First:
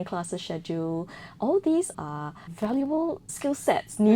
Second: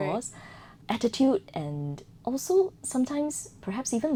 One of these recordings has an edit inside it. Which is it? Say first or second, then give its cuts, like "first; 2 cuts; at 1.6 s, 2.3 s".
first; 2 cuts; at 2.0 s, 3.3 s